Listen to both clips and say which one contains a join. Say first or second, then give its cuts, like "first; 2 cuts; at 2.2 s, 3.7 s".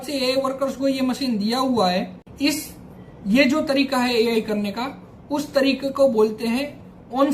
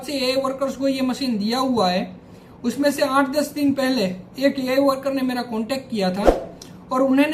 first; 1 cut; at 2.2 s